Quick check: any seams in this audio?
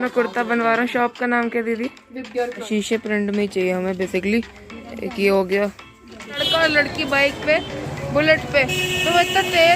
yes; 2 cuts; at 2.7 s, 6.4 s

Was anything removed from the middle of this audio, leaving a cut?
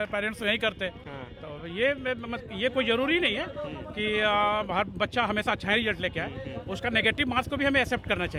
no; 0 cuts

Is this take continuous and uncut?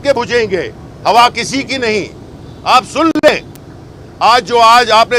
yes; 0 cuts

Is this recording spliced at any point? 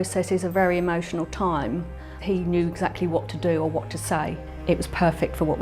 yes; 2 cuts; at 2.2 s, 4.5 s

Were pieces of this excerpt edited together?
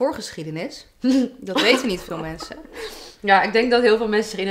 no; 0 cuts

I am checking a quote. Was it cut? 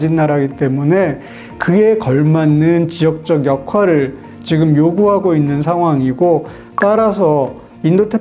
no; 0 cuts

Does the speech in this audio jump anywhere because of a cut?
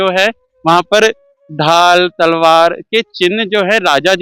no; 0 cuts

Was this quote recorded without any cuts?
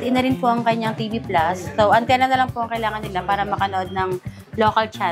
yes; 0 cuts

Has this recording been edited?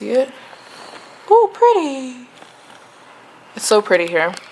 no; 0 cuts

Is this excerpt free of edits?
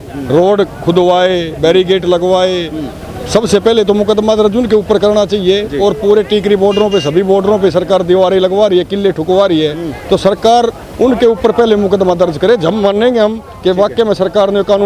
yes; 0 cuts

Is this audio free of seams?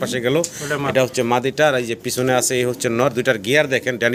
yes; 0 cuts

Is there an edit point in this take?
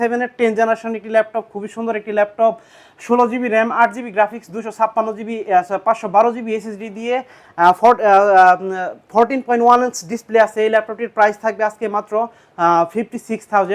no; 0 cuts

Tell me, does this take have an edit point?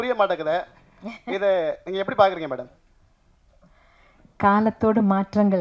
no; 0 cuts

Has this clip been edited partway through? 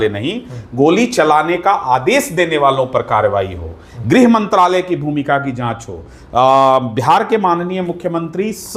no; 0 cuts

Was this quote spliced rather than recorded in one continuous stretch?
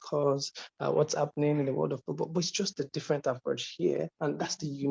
no; 0 cuts

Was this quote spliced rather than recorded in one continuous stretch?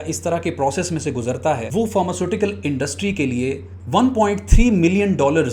yes; 2 cuts; at 1.7 s, 3.7 s

